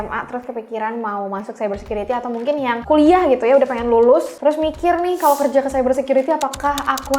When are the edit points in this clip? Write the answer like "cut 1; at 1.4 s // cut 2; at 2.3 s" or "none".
cut 1; at 2.8 s // cut 2; at 4.3 s